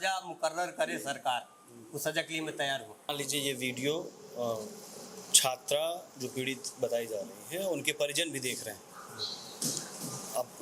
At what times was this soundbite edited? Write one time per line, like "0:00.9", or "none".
0:03.1